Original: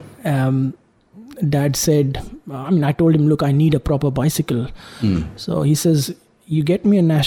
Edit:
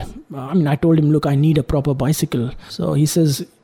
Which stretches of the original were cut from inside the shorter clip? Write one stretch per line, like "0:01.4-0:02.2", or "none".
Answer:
0:04.8-0:05.4